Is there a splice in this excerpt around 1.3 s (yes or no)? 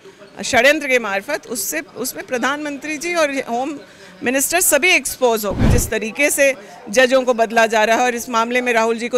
no